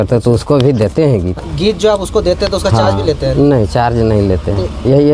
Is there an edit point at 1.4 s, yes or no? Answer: yes